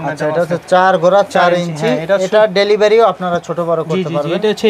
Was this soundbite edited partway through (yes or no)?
no